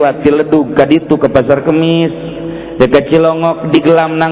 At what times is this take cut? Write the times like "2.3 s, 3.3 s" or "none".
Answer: none